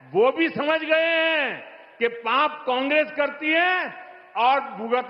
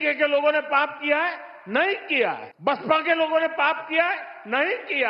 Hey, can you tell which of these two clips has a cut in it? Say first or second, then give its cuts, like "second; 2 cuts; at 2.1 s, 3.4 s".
second; 1 cut; at 2.5 s